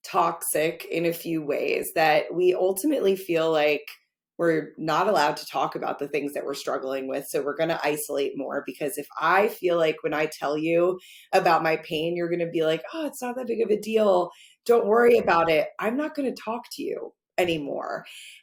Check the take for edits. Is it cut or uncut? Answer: uncut